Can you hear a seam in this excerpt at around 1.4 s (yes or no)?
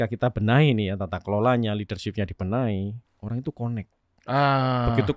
no